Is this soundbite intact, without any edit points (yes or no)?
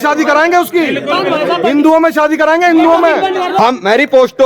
no